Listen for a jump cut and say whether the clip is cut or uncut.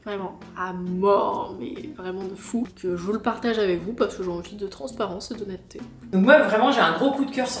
cut